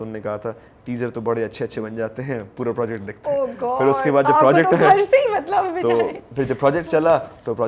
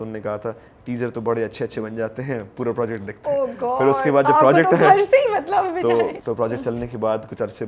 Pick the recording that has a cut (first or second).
second